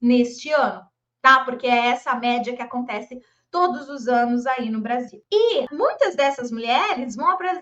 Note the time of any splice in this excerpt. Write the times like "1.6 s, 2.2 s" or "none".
5.2 s, 5.7 s